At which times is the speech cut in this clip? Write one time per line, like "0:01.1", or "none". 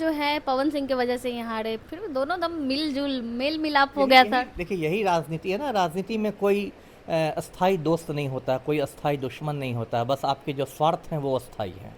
none